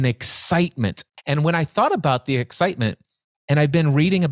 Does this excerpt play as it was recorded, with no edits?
no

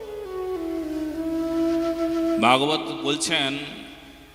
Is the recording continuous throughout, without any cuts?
yes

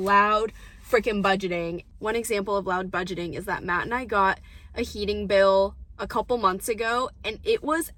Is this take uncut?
yes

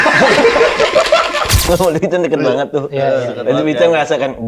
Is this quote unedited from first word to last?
no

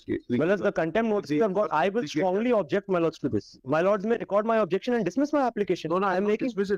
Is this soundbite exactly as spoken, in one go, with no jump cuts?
yes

